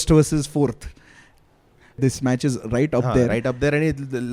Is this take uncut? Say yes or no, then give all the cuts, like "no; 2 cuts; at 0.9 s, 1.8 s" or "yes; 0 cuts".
no; 1 cut; at 2.0 s